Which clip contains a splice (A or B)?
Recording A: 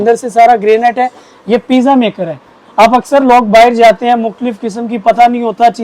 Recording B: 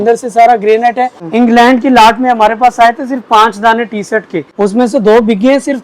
B